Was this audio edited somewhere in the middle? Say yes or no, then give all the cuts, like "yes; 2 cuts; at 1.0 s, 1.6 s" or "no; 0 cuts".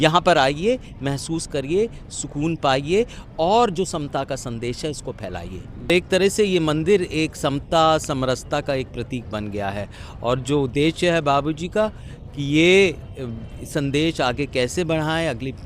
yes; 1 cut; at 5.9 s